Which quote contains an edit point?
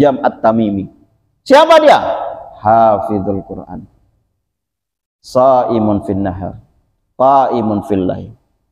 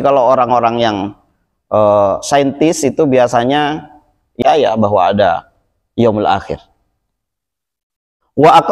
second; 1 cut; at 4.3 s

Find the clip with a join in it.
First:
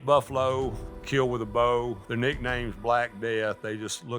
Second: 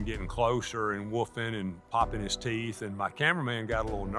first; 2 cuts; at 0.9 s, 2.0 s

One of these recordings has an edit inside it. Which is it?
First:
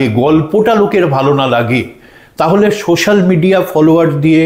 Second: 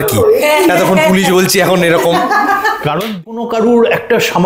second; 1 cut; at 3.0 s

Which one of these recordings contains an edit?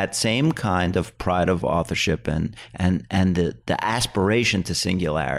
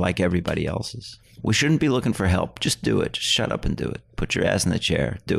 second; 1 cut; at 1.3 s

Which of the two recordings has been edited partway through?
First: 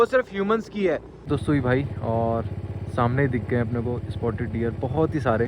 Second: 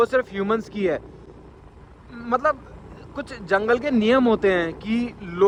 first; 1 cut; at 1.3 s

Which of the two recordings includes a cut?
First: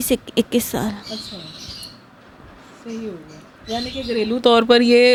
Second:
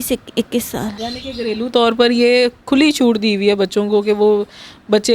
second; 1 cut; at 1.0 s

